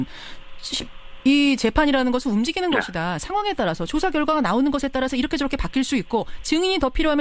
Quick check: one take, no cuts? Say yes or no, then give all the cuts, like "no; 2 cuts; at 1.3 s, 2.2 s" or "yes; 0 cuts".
no; 1 cut; at 3.1 s